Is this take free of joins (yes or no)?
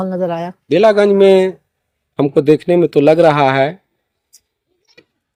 yes